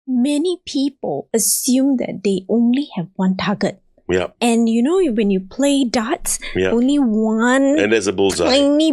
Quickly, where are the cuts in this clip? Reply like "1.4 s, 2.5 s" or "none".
1.2 s